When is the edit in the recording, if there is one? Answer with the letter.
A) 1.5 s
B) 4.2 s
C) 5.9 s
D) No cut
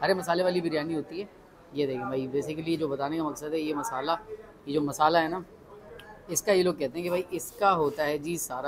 D